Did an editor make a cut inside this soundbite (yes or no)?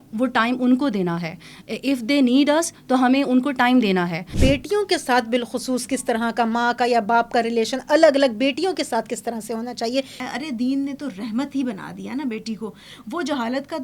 yes